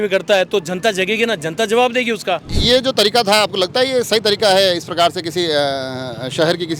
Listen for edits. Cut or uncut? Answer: cut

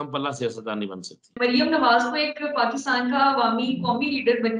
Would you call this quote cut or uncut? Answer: cut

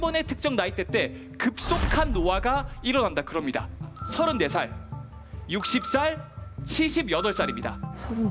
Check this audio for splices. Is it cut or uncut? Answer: cut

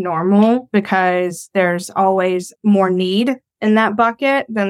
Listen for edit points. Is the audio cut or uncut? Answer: uncut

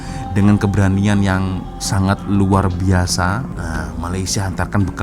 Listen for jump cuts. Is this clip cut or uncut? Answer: cut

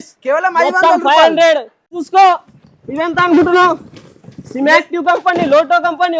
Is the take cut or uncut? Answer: cut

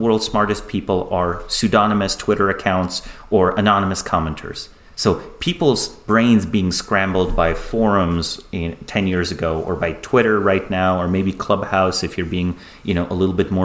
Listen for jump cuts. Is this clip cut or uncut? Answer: uncut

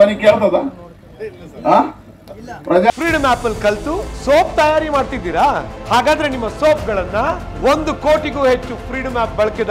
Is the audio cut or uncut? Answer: cut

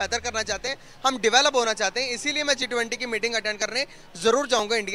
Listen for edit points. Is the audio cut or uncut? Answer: uncut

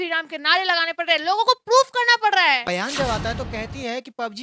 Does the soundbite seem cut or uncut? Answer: cut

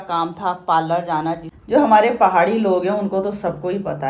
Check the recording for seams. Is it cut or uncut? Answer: cut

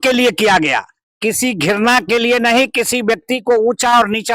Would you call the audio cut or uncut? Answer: uncut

